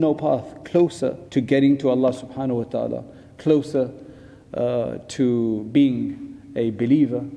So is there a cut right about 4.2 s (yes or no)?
no